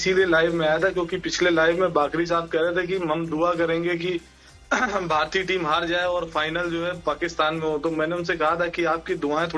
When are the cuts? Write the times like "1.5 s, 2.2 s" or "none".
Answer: none